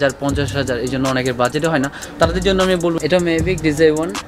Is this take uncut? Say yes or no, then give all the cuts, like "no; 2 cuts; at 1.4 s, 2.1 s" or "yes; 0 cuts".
no; 1 cut; at 2.9 s